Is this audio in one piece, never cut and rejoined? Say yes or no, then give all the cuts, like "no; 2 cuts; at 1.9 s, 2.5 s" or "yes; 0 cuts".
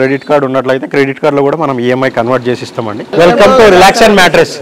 no; 1 cut; at 3.1 s